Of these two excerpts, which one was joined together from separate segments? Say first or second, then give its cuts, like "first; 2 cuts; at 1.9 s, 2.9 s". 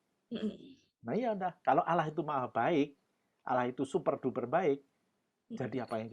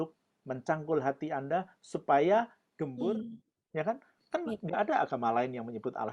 second; 1 cut; at 3.0 s